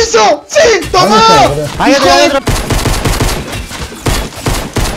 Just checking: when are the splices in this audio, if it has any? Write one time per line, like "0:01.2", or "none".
0:02.4